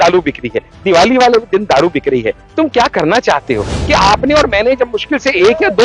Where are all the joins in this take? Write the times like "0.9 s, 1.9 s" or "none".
3.8 s